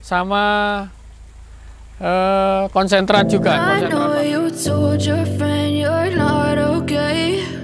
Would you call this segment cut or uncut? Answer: cut